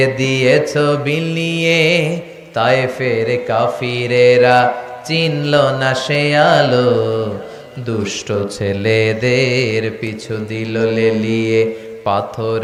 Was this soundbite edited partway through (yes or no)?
no